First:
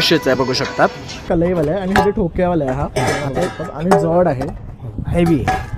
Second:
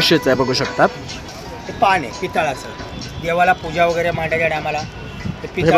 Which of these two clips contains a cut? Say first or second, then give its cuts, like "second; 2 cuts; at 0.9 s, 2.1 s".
first; 1 cut; at 1.2 s